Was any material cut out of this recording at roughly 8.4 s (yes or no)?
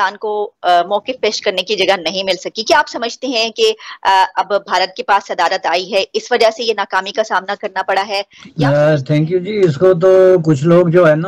yes